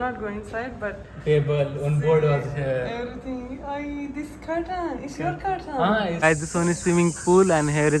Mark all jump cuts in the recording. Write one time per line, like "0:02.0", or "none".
0:06.2

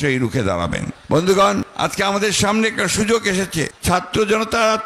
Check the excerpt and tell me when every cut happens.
0:00.9
0:01.7
0:03.7

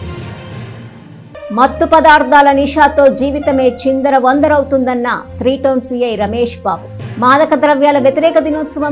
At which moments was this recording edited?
0:01.2

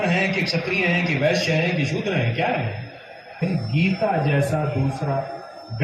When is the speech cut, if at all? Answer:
0:03.4

